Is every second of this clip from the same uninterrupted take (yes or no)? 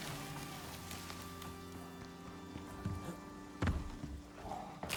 yes